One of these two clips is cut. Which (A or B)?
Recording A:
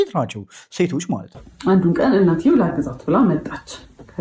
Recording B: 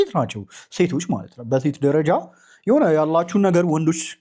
A